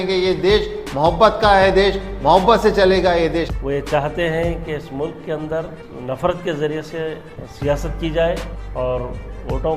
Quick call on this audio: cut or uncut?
cut